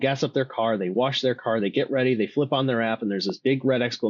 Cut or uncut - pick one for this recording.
uncut